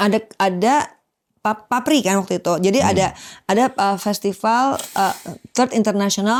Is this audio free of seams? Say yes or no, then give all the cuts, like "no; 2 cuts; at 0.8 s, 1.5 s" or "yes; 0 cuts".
yes; 0 cuts